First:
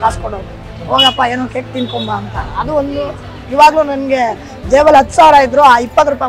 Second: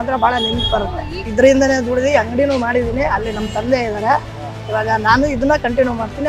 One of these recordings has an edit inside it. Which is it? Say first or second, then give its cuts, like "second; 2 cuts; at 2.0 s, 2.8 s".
second; 1 cut; at 1.2 s